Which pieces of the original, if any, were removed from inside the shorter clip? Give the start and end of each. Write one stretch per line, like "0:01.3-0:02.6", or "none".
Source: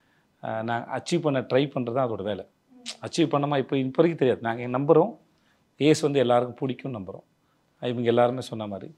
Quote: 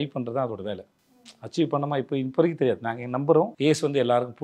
0:05.1-0:05.7